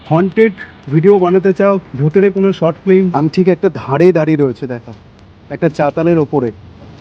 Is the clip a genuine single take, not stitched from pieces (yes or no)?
no